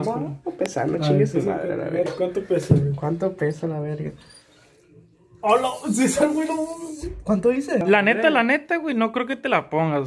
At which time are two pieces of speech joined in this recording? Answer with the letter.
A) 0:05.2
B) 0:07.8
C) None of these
B